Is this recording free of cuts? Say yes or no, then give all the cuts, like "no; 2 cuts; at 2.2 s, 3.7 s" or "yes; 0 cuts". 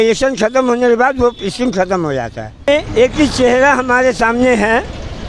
no; 1 cut; at 2.7 s